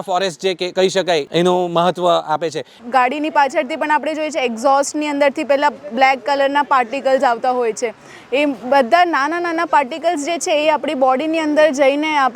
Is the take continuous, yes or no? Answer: no